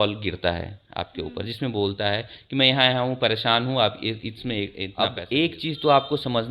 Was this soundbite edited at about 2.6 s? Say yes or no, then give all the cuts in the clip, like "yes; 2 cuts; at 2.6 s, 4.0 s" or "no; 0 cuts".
no; 1 cut; at 4.8 s